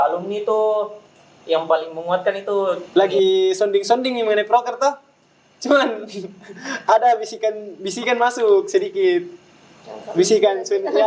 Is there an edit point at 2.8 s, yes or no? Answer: yes